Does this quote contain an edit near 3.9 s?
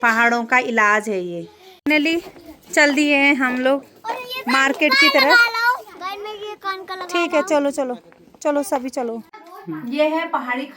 no; 2 cuts; at 2.0 s, 9.3 s

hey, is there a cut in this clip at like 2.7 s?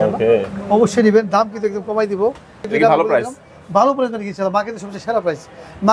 yes; 1 cut; at 2.7 s

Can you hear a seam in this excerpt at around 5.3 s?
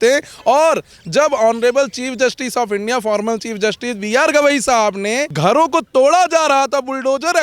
yes; 1 cut; at 5.3 s

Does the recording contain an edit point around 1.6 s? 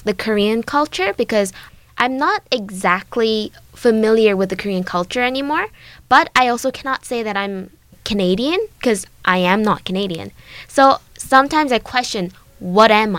yes; 2 cuts; at 1.6 s, 8.0 s

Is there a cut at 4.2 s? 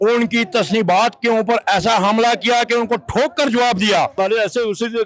yes; 1 cut; at 4.2 s

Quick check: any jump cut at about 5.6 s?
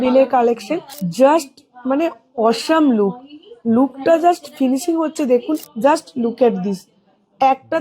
yes; 2 cuts; at 1.0 s, 5.6 s

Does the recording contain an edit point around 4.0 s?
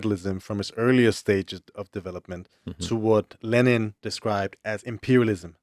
yes; 1 cut; at 4.0 s

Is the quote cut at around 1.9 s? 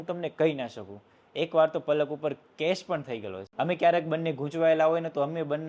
no; 1 cut; at 3.4 s

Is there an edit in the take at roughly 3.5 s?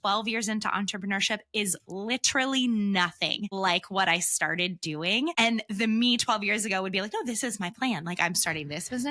yes; 2 cuts; at 3.5 s, 5.3 s

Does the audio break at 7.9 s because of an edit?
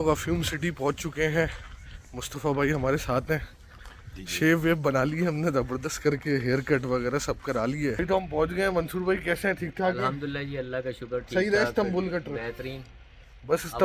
yes; 1 cut; at 7.9 s

